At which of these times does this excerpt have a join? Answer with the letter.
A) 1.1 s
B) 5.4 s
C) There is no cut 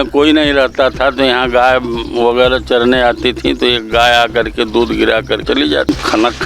B